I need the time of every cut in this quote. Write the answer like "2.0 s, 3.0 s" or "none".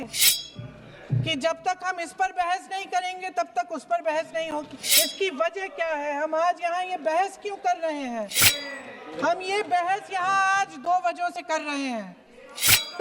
4.8 s, 8.4 s

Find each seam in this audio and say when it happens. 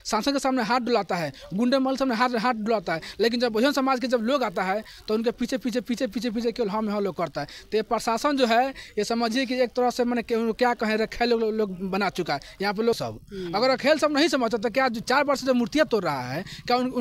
13.0 s

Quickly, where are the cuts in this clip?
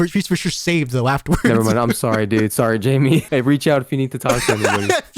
3.3 s

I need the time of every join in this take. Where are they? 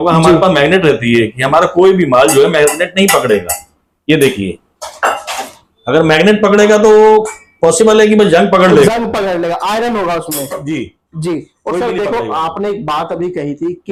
none

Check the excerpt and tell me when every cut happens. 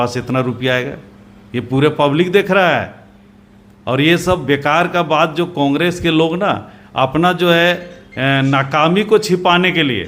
none

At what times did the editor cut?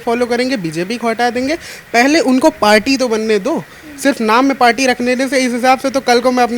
none

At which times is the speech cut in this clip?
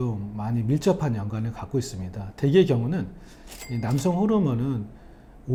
none

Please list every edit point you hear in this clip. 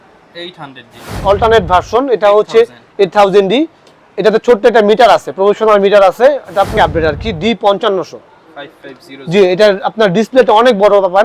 1.2 s, 6.8 s

